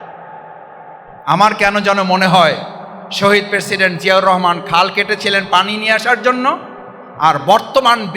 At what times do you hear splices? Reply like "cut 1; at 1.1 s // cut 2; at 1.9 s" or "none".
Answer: cut 1; at 1.1 s